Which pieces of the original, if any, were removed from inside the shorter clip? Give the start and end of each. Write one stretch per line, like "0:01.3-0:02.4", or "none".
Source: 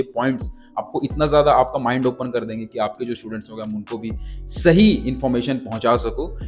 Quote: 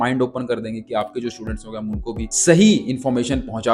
0:04.2-0:04.5